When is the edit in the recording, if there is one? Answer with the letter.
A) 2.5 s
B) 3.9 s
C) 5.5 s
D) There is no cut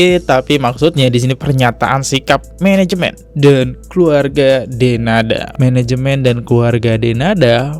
C